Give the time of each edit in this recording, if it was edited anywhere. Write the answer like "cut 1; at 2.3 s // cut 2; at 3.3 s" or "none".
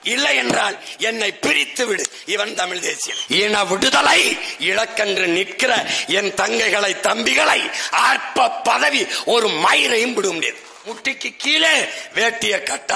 cut 1; at 3.1 s // cut 2; at 11.0 s

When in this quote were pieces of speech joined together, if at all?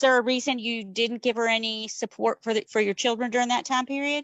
none

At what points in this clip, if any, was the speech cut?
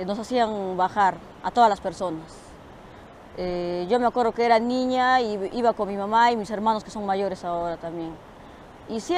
cut 1; at 6.9 s

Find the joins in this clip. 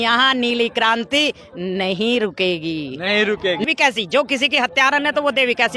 cut 1; at 3.6 s

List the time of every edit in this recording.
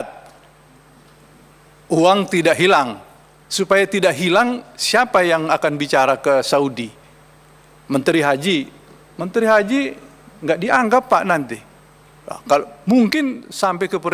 none

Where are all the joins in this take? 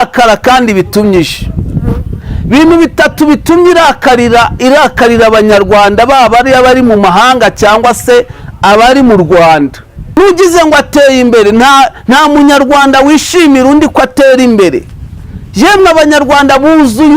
cut 1; at 10.2 s

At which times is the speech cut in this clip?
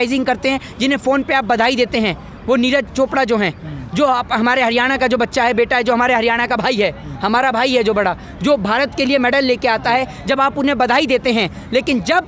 none

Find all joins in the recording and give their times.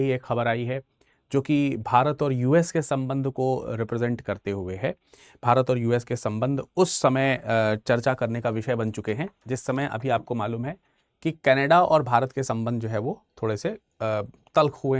none

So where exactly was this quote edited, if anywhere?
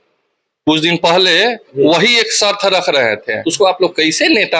cut 1; at 3.4 s

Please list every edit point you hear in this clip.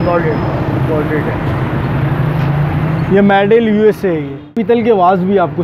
cut 1; at 4.5 s

